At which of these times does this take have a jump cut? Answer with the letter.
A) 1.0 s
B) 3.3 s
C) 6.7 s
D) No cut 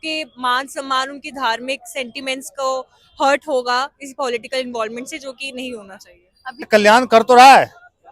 C